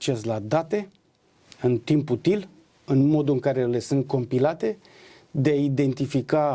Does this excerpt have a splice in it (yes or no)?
no